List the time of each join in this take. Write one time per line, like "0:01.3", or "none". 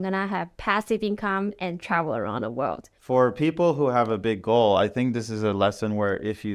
0:02.9